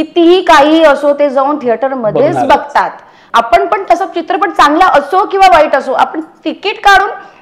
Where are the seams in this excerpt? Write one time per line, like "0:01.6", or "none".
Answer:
0:03.1

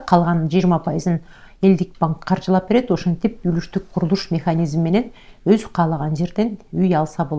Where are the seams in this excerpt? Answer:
none

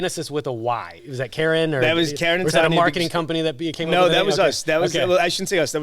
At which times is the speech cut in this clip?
0:00.9

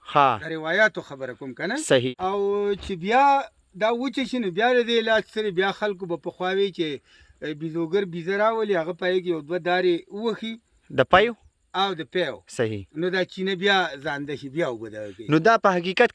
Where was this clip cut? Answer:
0:02.1

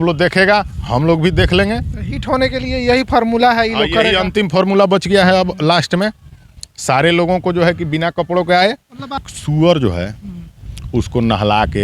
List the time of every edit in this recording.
0:09.3

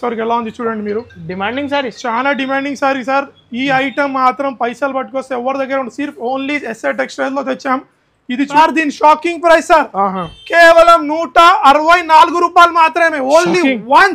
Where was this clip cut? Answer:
0:08.5

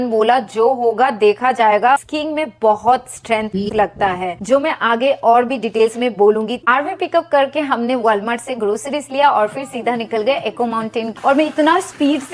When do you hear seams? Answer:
0:02.1
0:06.6
0:11.1

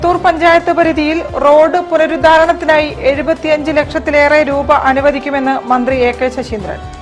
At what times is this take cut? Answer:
none

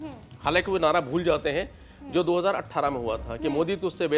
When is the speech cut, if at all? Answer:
none

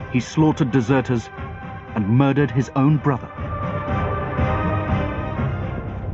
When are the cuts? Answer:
0:02.9

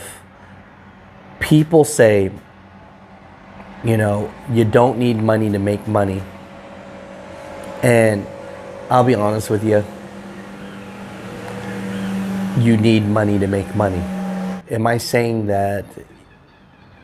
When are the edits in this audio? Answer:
0:14.5

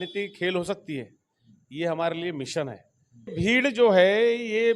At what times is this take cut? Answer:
0:03.3

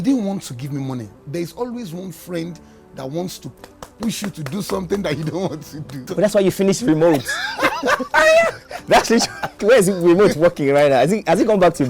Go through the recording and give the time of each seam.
0:01.2
0:03.5
0:06.1
0:09.6

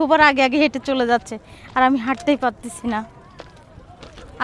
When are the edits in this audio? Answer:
none

